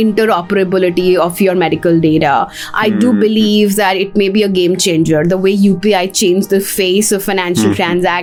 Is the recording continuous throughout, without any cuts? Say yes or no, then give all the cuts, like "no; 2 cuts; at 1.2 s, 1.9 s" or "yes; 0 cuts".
yes; 0 cuts